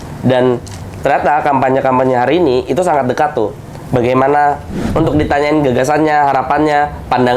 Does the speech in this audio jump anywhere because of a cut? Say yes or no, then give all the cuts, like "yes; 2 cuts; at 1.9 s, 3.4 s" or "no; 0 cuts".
yes; 1 cut; at 4.9 s